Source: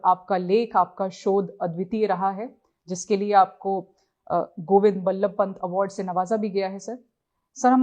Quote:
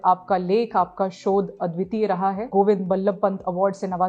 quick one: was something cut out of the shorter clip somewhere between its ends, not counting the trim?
yes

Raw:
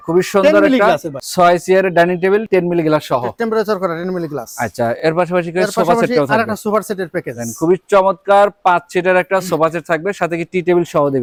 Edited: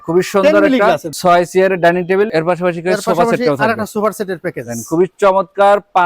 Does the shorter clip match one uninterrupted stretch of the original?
no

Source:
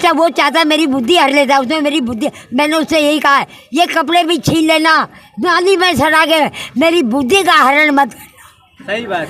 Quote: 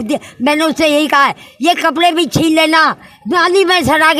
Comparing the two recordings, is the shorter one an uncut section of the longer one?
yes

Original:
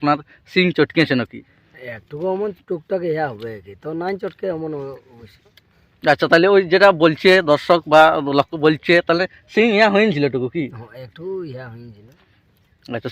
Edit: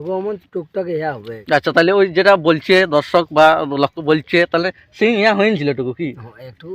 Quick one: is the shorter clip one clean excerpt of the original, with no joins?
no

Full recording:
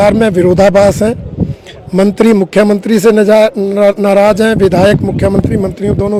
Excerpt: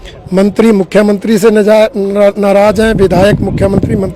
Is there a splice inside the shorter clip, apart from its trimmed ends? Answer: no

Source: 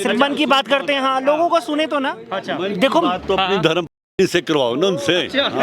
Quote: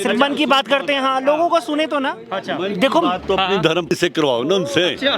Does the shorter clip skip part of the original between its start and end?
yes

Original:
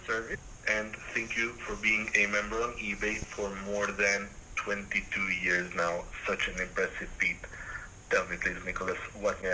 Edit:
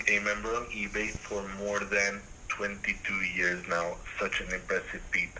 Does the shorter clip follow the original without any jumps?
yes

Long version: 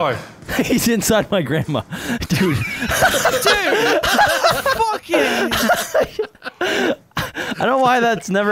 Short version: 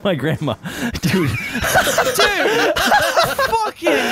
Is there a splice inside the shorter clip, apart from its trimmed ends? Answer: no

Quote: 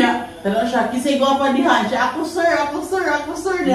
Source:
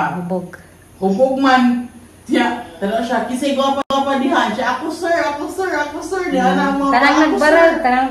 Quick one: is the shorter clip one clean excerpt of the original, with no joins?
no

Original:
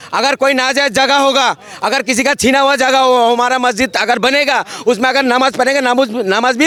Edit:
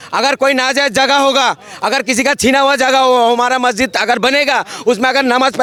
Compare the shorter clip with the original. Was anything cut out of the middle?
no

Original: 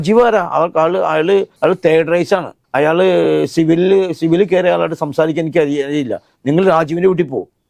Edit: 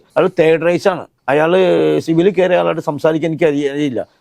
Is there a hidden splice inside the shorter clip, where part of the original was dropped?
yes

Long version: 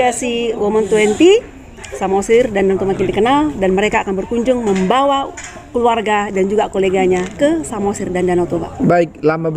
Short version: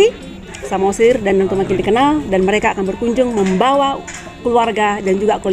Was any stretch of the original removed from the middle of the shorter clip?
no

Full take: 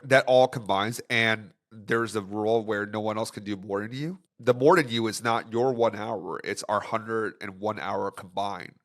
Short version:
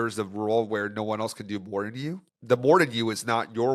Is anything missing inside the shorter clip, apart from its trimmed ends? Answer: no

